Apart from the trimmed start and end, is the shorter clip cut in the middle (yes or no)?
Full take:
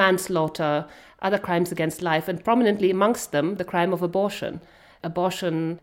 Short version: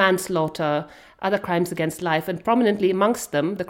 no